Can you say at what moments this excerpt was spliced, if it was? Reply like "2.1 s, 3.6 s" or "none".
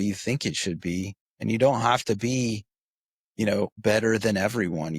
1.2 s, 3.8 s